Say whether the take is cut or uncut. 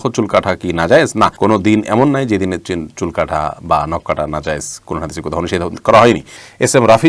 uncut